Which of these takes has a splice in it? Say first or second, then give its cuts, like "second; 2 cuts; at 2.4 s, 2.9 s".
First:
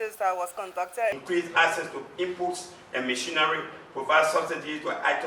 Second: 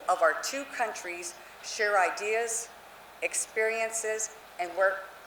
first; 1 cut; at 1.2 s